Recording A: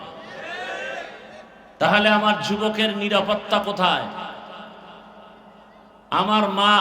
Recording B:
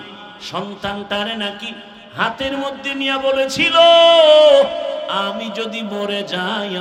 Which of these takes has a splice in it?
A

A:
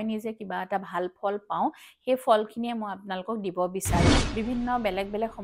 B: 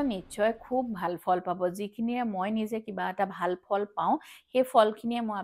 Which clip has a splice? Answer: A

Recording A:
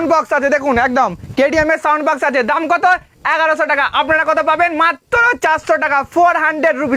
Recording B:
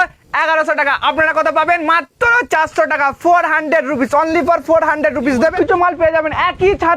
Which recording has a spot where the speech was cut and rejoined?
B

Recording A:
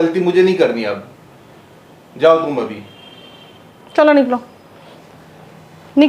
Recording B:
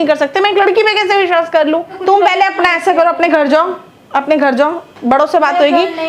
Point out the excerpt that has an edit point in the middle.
B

